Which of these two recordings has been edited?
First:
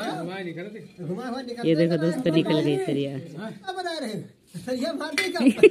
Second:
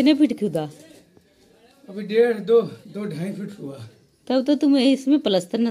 first; 1 cut; at 3.7 s

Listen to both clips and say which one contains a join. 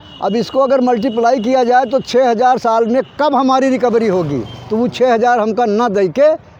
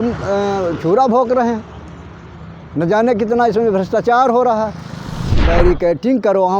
second; 1 cut; at 5.4 s

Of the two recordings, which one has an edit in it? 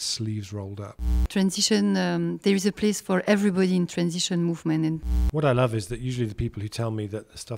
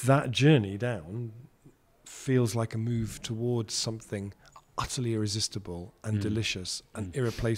first; 2 cuts; at 1.2 s, 5.0 s

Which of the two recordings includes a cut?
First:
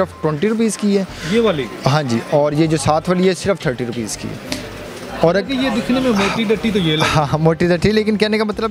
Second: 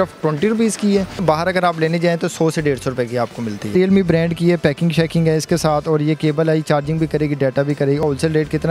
second; 3 cuts; at 1.2 s, 3.7 s, 8.0 s

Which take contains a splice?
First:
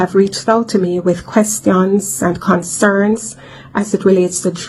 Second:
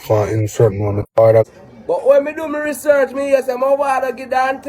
second; 1 cut; at 1.5 s

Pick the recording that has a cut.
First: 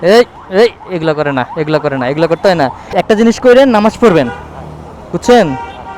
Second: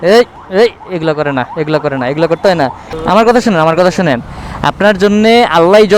second; 1 cut; at 2.8 s

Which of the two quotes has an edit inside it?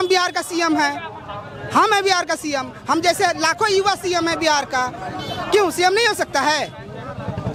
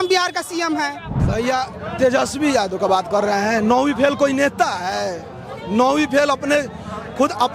second; 1 cut; at 1.1 s

